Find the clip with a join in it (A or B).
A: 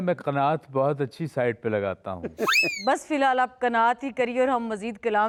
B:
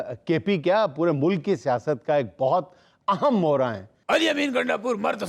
B